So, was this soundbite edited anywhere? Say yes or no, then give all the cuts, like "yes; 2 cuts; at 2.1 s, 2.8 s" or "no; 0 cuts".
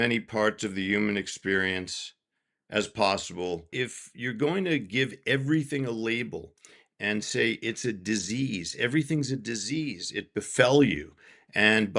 yes; 1 cut; at 3.7 s